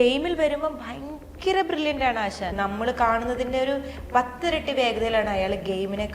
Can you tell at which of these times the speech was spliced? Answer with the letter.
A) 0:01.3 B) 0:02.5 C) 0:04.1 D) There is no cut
B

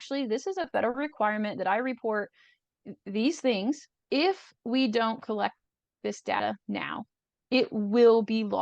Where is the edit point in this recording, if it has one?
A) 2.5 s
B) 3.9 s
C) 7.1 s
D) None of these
B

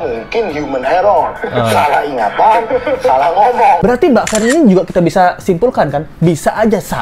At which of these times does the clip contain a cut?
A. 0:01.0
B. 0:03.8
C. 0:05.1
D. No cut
B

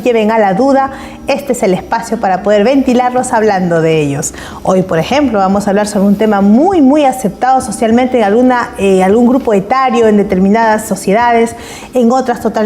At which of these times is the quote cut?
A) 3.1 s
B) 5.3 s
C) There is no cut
A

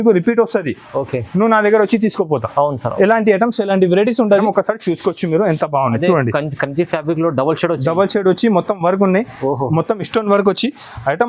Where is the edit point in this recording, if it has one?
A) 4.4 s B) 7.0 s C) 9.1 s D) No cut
A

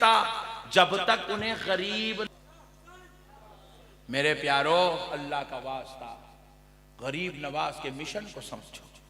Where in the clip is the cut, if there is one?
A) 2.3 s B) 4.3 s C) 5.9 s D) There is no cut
A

